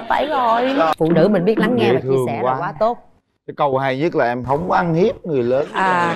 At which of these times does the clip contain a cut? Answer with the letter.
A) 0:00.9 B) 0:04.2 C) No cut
A